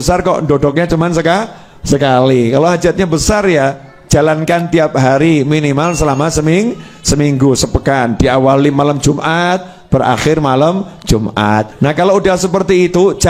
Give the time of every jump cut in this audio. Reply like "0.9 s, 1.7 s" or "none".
11.7 s